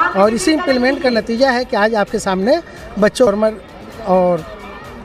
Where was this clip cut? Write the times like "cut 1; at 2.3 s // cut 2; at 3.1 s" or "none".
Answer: cut 1; at 3.3 s